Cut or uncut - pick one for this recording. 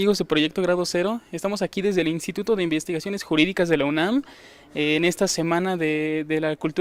uncut